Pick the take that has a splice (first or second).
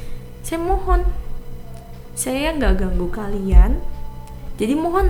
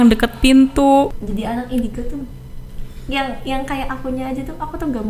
second